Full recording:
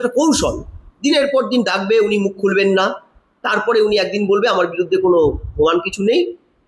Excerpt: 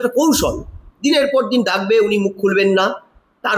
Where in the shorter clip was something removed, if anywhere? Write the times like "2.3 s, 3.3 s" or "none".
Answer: none